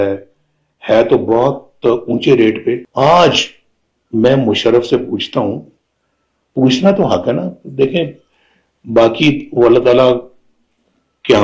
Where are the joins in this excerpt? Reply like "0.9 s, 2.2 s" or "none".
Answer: 2.9 s